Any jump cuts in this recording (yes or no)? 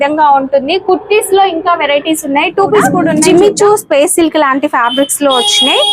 yes